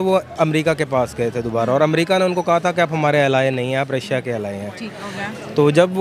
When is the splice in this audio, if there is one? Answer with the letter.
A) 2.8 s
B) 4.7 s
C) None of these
C